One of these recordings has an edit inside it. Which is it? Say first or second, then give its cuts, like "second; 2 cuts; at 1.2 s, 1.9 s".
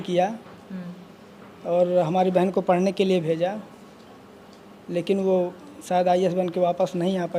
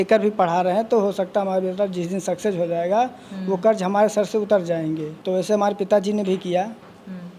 second; 1 cut; at 5.1 s